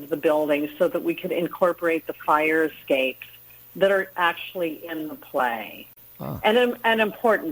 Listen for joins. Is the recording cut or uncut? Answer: uncut